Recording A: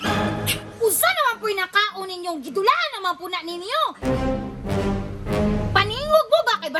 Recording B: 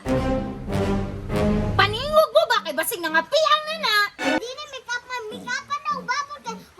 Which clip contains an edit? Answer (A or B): B